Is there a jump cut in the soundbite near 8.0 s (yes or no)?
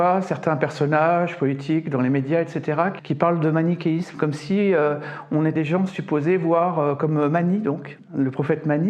yes